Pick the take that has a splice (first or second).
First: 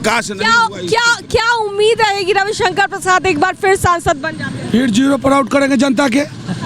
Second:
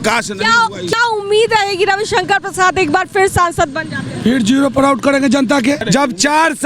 second